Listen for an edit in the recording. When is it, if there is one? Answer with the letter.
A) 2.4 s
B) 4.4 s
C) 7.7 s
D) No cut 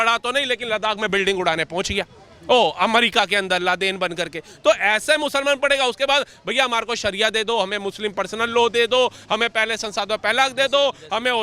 D